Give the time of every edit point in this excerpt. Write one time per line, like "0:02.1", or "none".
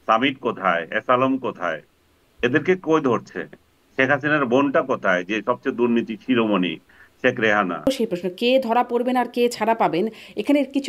0:07.9

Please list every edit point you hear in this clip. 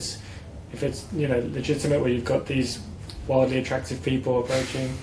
none

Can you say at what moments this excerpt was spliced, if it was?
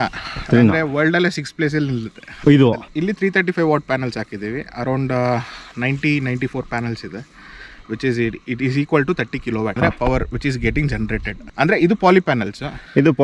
none

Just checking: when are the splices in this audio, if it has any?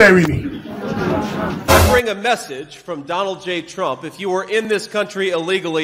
0:01.6

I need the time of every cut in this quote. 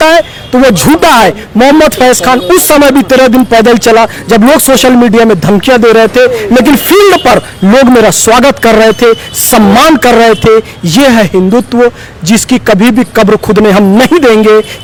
none

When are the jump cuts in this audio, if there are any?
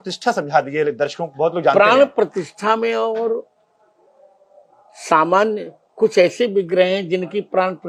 none

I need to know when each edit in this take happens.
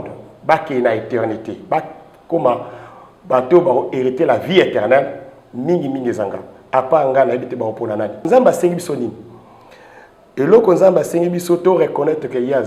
0:08.3

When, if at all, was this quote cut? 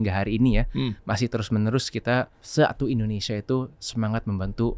0:02.4

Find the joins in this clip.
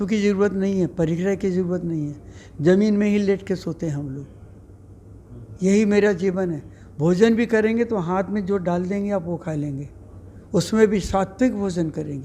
none

